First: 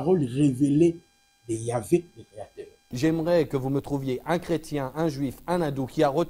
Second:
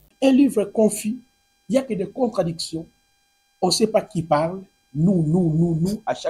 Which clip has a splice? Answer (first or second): first